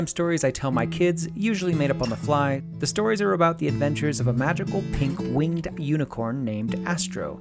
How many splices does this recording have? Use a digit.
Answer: 1